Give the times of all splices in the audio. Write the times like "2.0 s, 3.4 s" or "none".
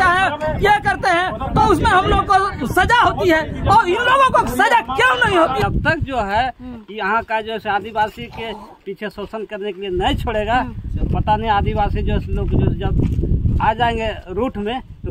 5.6 s

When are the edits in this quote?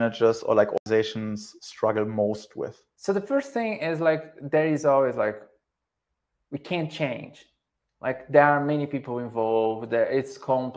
0.8 s, 2.9 s

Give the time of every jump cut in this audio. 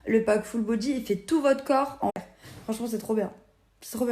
2.1 s

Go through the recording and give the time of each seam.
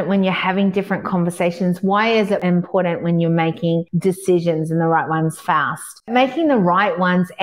2.4 s, 3.9 s, 6.1 s

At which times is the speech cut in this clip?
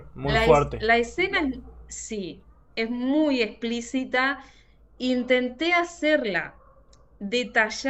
none

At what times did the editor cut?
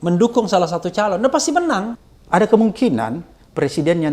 2.0 s

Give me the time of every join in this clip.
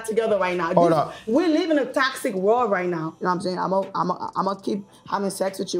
3.1 s

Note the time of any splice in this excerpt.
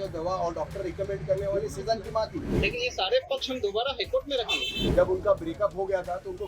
2.5 s, 4.7 s

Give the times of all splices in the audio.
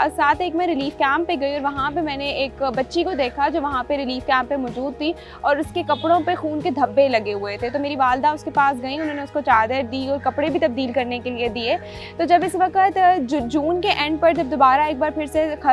11.9 s

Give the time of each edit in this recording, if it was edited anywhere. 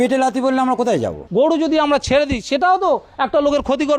1.2 s

